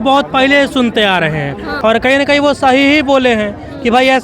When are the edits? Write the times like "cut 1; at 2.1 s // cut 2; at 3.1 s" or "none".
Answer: cut 1; at 1.7 s